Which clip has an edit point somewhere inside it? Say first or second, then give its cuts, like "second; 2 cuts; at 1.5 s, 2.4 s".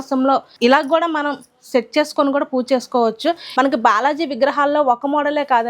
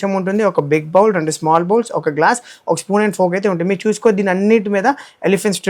first; 1 cut; at 3.4 s